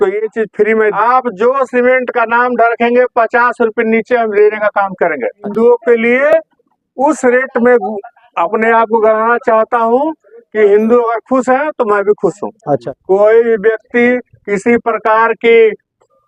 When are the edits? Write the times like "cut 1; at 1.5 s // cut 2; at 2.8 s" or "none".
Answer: cut 1; at 1.0 s // cut 2; at 5.5 s // cut 3; at 12.8 s